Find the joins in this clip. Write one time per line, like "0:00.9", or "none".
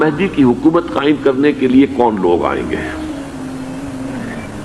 none

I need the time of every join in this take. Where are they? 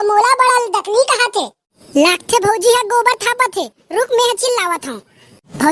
0:01.5

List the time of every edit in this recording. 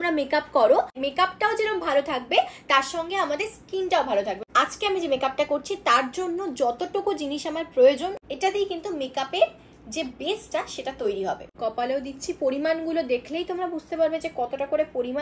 0:01.0
0:04.4
0:08.2
0:11.5

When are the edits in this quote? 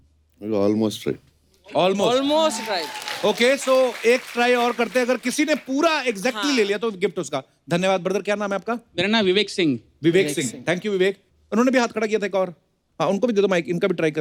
none

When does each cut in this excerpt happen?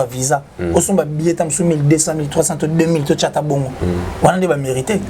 none

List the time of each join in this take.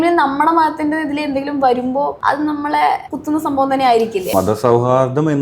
0:02.2
0:03.1
0:04.3

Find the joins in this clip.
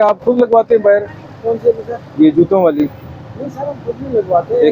none

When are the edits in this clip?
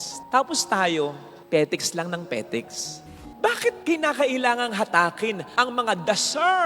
0:03.2

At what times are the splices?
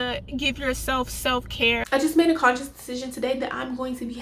0:01.8

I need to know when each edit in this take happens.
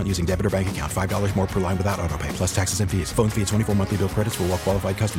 none

